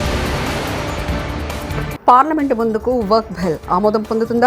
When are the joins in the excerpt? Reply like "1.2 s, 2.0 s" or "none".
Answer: 1.7 s